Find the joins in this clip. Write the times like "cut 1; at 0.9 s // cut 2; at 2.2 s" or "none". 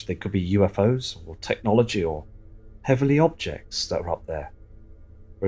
none

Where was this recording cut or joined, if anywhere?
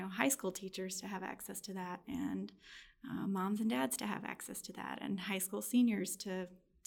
none

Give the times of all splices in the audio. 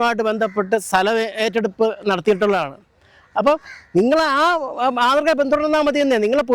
none

